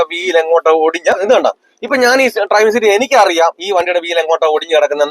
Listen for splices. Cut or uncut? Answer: cut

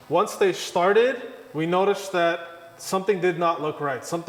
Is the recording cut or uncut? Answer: uncut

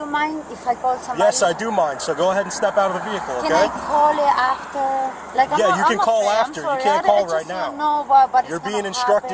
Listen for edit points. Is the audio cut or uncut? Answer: uncut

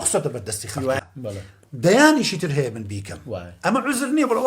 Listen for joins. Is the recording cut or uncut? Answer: cut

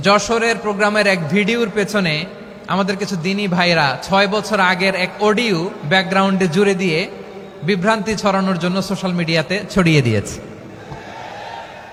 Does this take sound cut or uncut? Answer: uncut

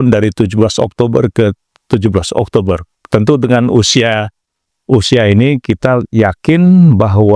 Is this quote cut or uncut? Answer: cut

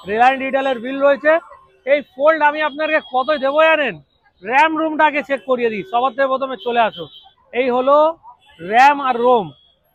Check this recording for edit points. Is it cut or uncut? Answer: uncut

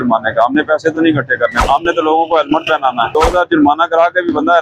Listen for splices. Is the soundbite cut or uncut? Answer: cut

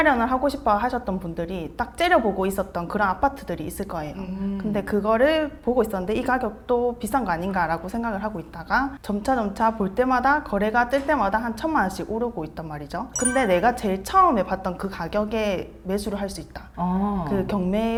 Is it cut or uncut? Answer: uncut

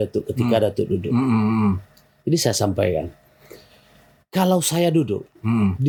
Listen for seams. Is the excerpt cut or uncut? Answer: uncut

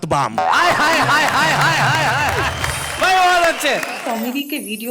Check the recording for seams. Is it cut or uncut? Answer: cut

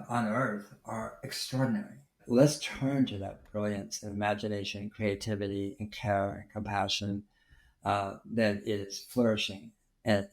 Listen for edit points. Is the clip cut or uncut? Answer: cut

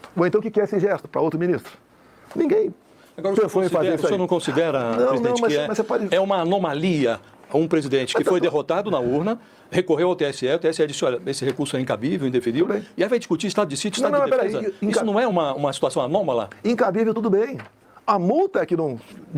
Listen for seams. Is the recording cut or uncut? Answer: uncut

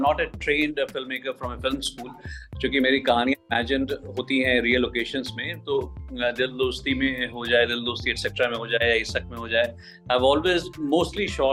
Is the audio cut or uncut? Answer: uncut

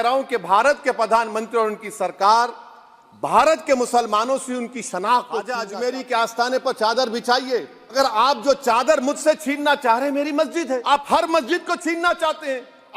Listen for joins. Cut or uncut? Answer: cut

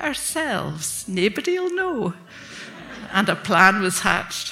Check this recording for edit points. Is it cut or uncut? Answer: uncut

